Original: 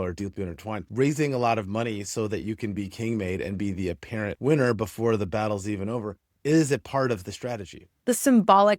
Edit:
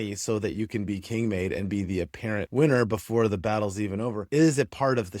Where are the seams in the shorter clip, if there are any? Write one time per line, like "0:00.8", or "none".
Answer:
0:04.2